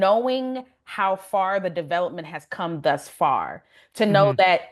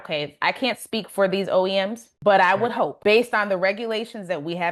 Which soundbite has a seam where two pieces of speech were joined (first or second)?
second